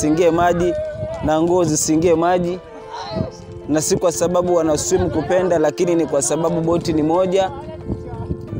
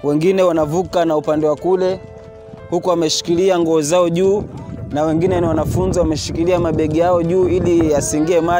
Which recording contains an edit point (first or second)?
first